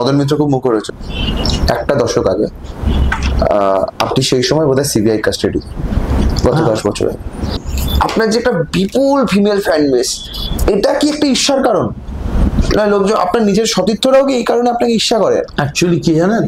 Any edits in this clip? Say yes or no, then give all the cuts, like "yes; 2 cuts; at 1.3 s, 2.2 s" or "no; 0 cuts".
yes; 2 cuts; at 0.9 s, 7.6 s